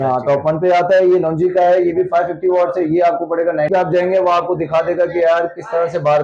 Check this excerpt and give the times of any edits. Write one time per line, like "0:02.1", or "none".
0:03.7